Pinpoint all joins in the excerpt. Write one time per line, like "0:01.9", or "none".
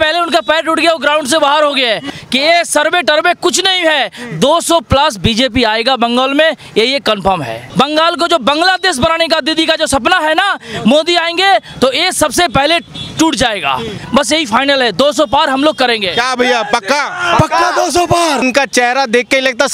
0:02.0
0:07.6
0:14.0
0:18.4